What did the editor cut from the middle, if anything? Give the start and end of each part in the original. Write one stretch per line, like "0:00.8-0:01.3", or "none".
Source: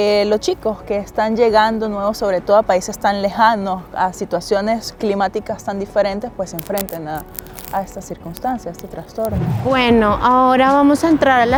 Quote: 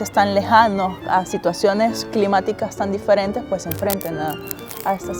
none